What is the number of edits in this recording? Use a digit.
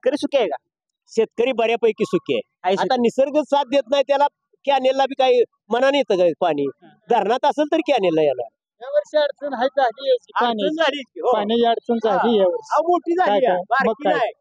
0